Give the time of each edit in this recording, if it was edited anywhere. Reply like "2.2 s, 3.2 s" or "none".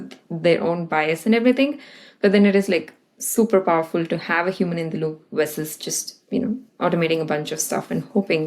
none